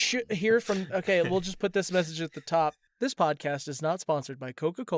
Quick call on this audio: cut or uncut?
cut